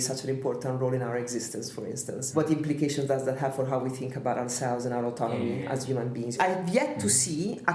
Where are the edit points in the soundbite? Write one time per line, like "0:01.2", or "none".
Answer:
0:02.3
0:06.4